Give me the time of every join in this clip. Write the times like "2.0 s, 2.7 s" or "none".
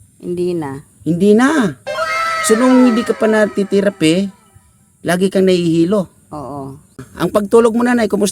7.0 s